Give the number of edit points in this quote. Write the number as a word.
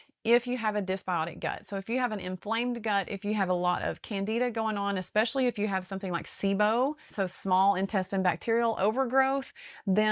one